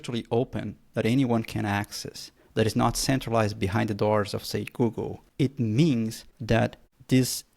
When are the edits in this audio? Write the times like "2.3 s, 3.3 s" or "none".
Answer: 5.2 s, 6.6 s

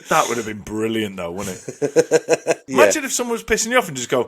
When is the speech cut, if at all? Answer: 2.6 s

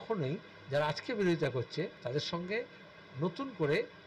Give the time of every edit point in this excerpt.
2.0 s

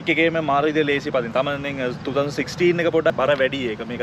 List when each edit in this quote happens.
3.1 s

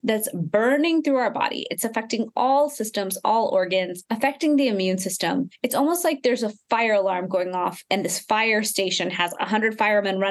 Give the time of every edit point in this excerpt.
4.0 s, 5.6 s

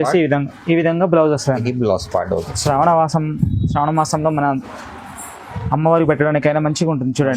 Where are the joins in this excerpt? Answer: 2.5 s

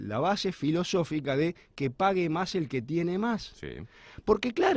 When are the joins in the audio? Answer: none

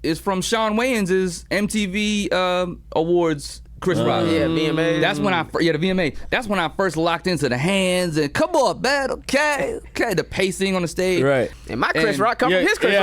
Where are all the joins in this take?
11.5 s

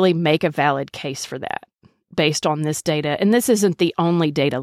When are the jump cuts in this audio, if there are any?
none

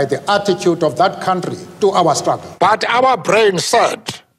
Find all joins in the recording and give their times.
2.5 s

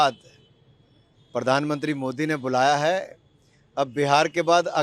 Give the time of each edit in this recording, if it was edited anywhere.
none

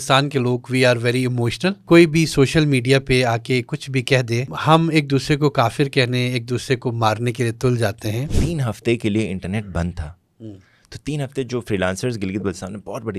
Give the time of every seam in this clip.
1.8 s, 4.5 s, 8.4 s

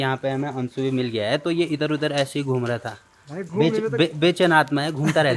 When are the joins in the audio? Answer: none

